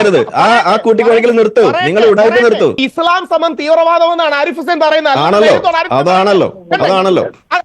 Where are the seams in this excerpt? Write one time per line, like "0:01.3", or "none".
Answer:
0:02.8